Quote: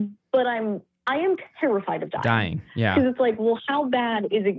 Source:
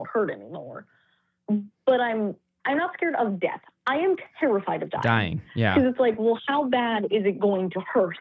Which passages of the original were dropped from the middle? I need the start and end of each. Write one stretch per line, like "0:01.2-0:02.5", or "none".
0:02.5-0:03.7